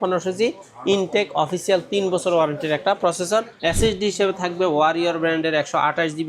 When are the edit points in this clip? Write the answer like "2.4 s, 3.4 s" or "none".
3.5 s